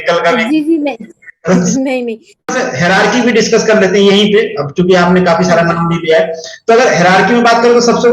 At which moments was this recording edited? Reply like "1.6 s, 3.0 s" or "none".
2.4 s